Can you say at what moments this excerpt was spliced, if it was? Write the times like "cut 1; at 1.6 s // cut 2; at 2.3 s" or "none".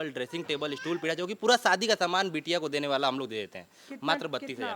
none